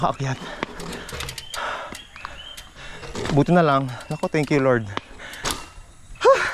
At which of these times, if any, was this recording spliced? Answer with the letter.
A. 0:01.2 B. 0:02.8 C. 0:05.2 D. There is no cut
B